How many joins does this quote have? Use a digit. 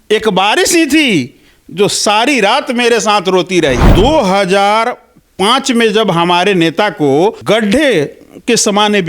2